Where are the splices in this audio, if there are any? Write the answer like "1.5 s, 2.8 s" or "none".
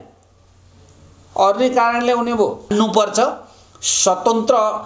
2.7 s

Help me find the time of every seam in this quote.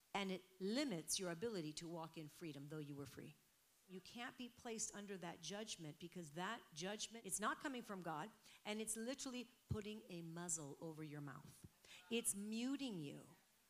3.9 s, 7.2 s

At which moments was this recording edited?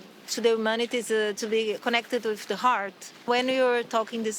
3.3 s

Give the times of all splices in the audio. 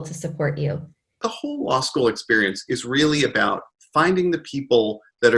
1.2 s

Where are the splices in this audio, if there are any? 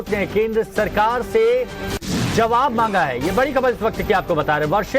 3.8 s

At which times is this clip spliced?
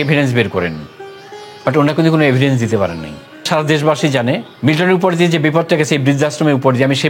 3.5 s, 4.5 s

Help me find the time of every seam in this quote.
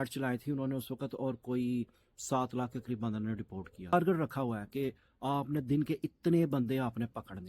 3.9 s

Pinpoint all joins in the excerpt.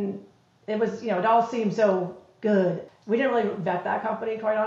2.8 s

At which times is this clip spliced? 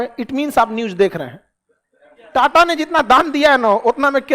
2.2 s

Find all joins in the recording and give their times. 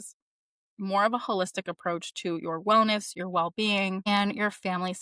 4.1 s

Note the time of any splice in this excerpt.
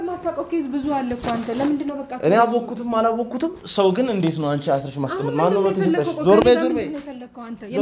none

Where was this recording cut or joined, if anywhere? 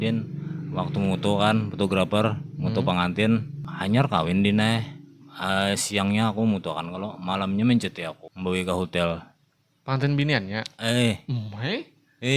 3.6 s, 8.2 s

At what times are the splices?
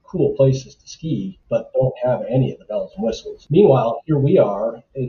1.7 s, 3.3 s

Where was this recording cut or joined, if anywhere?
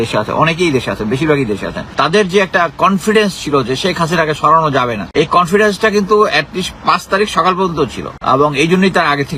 1.8 s, 5.0 s, 8.1 s

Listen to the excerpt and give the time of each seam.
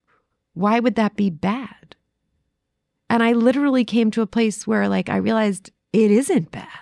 5.7 s

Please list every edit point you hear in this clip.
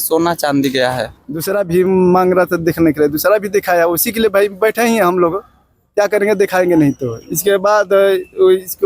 1.4 s

